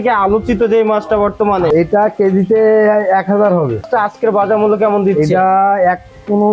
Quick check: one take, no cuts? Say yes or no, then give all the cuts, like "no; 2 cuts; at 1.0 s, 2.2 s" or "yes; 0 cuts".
no; 2 cuts; at 1.7 s, 3.8 s